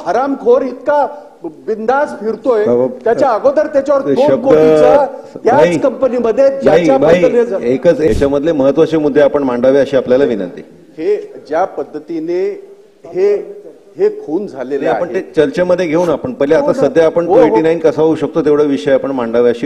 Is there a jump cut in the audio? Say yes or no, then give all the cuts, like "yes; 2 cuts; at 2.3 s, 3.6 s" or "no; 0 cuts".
yes; 1 cut; at 8.1 s